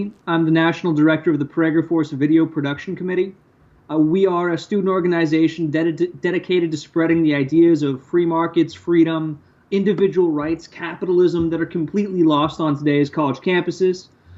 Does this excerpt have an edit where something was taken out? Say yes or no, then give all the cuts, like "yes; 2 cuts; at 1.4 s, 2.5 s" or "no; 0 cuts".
yes; 1 cut; at 6.1 s